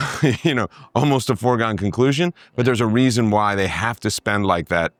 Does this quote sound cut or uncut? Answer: uncut